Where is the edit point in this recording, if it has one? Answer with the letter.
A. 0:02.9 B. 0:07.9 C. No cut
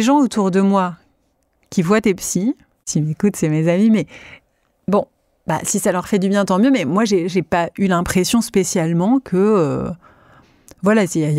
A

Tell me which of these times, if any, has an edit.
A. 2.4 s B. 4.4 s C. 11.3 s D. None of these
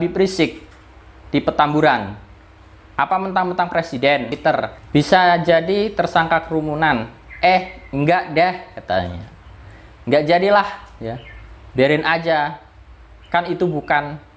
B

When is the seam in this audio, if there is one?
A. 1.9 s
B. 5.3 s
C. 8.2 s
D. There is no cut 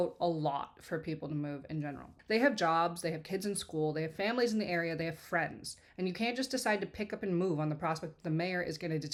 D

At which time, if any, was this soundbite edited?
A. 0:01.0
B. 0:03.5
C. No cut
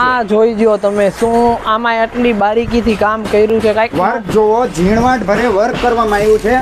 C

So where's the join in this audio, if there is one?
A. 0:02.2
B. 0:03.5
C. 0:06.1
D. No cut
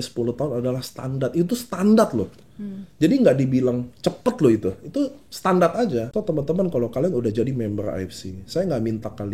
C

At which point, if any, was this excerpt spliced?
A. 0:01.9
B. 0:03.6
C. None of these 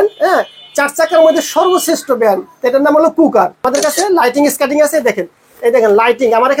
B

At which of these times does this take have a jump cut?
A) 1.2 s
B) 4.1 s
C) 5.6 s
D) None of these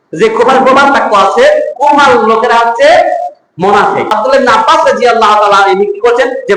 B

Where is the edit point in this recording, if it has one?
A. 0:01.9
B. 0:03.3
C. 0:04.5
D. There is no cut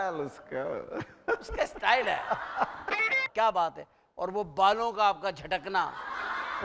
B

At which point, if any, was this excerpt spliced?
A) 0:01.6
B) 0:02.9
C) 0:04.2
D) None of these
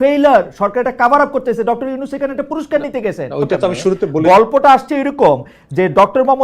C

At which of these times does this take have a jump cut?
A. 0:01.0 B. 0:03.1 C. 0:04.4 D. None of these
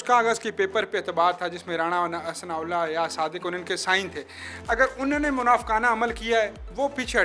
D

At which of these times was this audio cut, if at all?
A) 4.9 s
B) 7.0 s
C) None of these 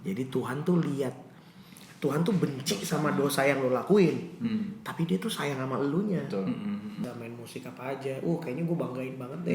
B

